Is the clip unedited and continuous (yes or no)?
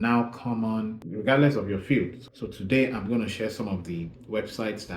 no